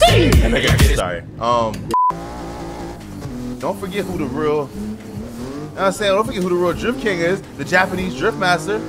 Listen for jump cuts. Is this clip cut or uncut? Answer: cut